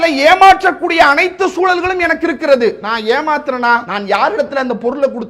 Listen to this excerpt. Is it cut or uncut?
cut